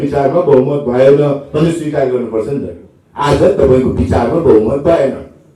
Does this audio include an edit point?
no; 0 cuts

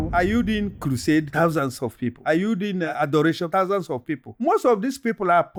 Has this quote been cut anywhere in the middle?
no; 0 cuts

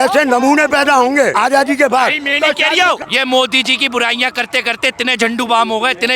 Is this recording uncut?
no; 2 cuts; at 1.3 s, 3.1 s

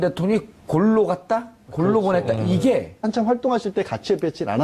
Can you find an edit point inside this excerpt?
no; 0 cuts

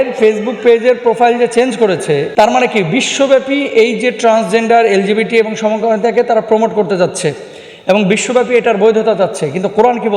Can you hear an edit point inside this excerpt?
yes; 1 cut; at 2.3 s

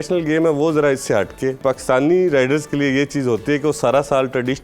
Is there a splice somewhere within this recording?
yes; 1 cut; at 1.6 s

